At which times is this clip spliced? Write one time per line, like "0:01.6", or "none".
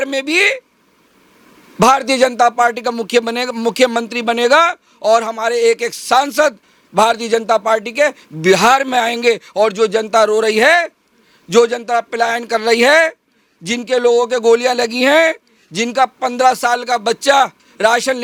none